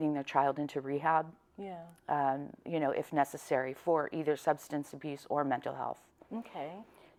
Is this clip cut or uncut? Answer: uncut